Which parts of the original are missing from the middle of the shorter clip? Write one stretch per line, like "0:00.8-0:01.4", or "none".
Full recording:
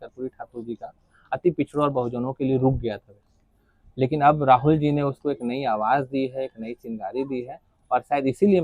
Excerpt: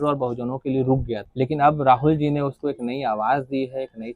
0:03.0-0:03.9